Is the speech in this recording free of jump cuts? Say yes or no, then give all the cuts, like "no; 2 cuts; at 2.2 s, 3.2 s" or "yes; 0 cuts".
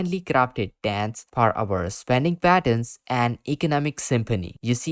yes; 0 cuts